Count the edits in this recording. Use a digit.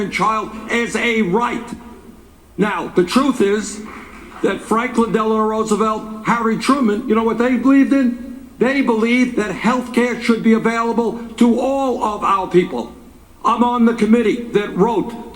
2